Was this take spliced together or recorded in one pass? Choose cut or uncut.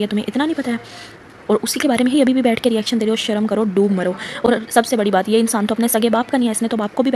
uncut